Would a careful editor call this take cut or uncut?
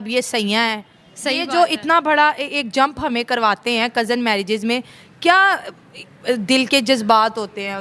uncut